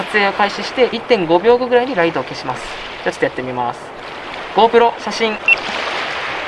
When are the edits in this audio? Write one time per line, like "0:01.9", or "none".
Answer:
0:01.0
0:05.4